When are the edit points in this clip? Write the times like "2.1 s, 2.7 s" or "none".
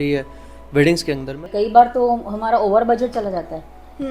1.5 s